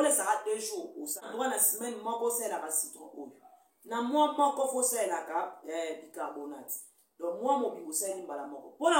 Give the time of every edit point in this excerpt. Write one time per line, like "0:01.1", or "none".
0:01.2